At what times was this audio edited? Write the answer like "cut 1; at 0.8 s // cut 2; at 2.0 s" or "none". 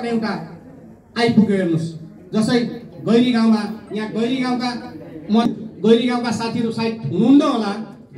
none